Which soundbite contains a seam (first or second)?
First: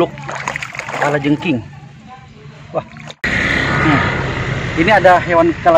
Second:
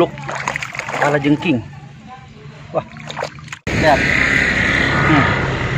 first